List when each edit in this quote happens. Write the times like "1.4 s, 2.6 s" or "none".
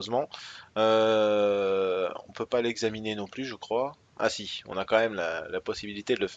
none